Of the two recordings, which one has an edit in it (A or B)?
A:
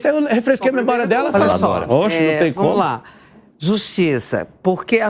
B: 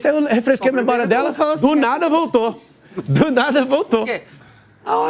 A